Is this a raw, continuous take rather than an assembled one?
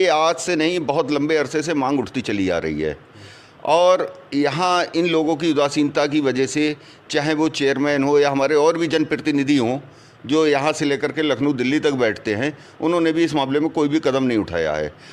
yes; 0 cuts

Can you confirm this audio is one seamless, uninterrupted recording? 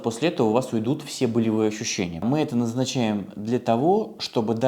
no; 1 cut; at 2.2 s

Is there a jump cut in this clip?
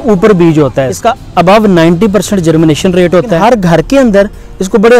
yes; 2 cuts; at 0.9 s, 3.4 s

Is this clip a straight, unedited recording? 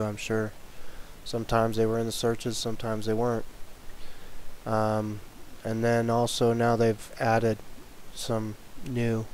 no; 1 cut; at 5.9 s

